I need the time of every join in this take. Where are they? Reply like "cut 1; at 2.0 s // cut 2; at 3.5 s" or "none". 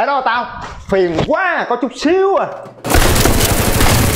cut 1; at 2.8 s